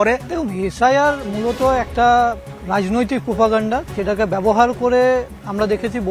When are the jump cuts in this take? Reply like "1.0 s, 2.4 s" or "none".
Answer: none